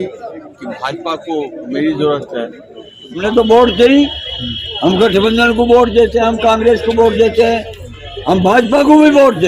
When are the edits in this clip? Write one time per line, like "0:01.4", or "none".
0:03.2